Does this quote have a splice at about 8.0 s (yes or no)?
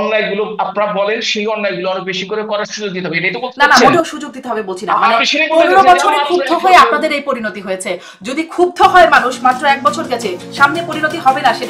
no